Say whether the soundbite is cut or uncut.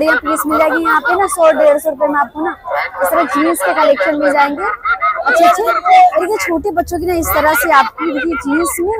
uncut